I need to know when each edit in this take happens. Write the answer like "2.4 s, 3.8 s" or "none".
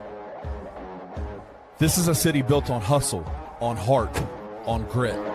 1.1 s